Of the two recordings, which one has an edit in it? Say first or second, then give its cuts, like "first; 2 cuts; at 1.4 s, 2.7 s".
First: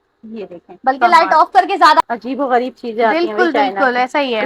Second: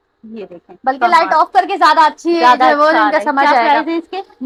first; 1 cut; at 2.0 s